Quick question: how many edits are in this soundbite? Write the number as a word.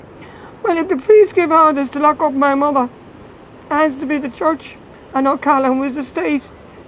zero